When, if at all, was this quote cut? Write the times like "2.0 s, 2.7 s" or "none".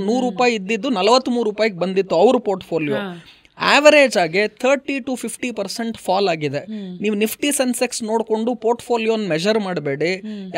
none